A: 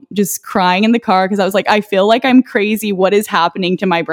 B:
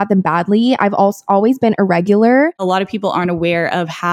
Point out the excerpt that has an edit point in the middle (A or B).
B